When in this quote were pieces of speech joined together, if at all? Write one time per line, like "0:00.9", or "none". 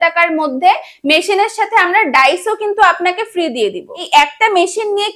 0:04.0